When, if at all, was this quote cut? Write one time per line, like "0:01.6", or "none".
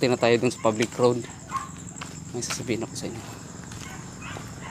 none